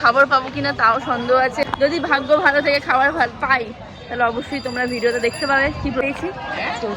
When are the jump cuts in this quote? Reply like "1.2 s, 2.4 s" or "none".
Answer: 1.7 s, 6.0 s